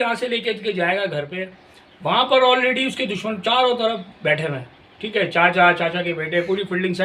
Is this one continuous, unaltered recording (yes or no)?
yes